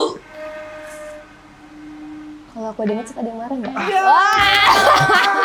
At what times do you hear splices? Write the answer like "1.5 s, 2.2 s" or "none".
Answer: none